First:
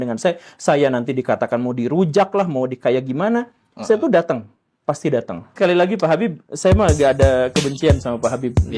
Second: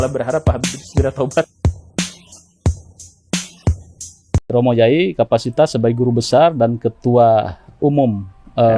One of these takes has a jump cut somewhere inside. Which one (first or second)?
second